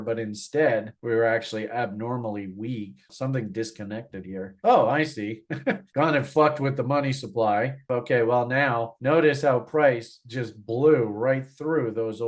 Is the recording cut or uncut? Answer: cut